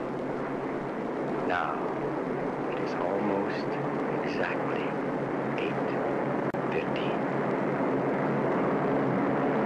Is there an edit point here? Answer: yes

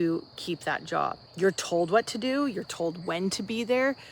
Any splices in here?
yes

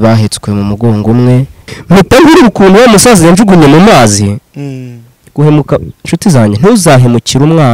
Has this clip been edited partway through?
yes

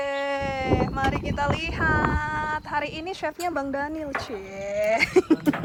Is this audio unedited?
yes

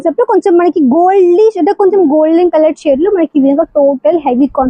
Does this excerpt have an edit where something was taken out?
no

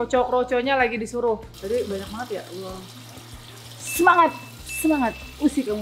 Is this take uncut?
no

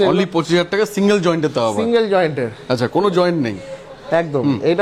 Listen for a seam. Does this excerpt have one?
no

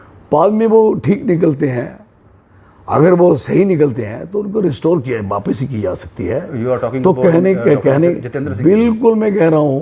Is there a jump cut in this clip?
no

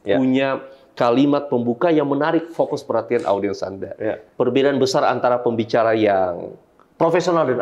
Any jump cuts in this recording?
yes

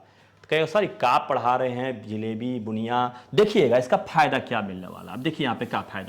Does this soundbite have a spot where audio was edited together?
no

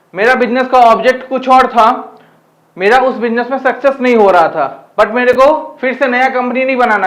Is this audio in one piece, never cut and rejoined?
yes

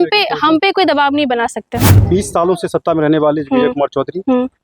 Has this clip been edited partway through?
yes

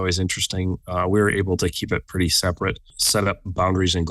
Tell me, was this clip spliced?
yes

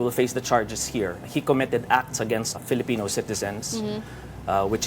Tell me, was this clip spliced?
yes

